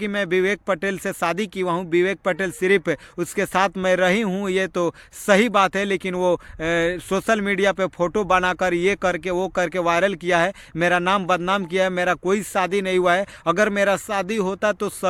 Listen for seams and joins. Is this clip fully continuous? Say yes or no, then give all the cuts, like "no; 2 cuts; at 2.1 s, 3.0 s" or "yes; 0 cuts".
yes; 0 cuts